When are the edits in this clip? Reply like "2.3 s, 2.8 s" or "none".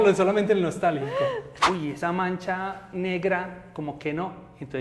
1.5 s